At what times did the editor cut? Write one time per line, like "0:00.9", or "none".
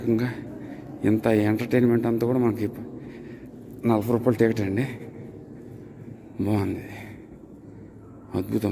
none